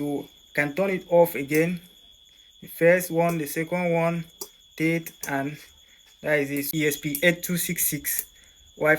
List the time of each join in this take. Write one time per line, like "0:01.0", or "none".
0:06.7